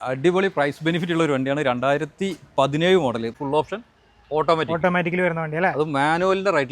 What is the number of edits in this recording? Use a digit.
1